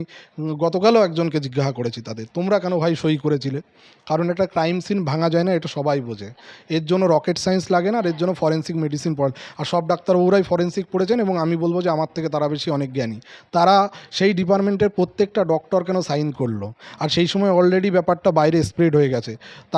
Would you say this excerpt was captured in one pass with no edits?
yes; 0 cuts

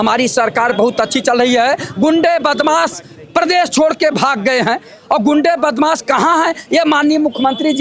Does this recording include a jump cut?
no; 0 cuts

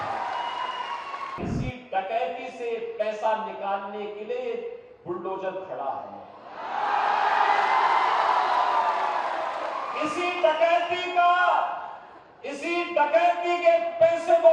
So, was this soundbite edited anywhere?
yes; 1 cut; at 1.4 s

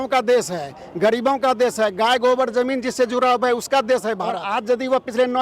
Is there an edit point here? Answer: yes; 1 cut; at 4.4 s

